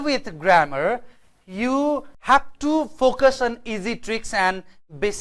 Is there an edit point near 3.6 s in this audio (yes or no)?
no